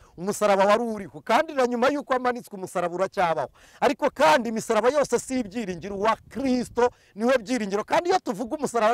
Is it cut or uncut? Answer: uncut